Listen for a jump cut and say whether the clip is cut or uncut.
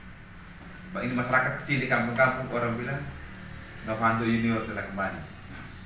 uncut